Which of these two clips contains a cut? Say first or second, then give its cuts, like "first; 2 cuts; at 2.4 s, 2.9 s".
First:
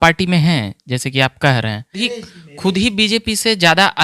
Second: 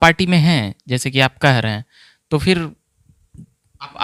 first; 1 cut; at 2.0 s